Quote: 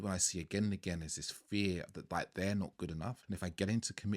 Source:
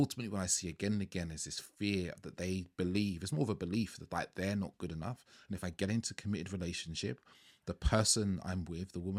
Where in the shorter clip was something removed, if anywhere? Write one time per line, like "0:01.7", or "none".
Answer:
0:02.0
0:03.2